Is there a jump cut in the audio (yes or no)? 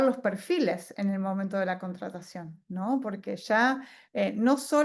no